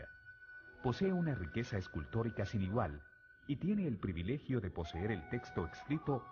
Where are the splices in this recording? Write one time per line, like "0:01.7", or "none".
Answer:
none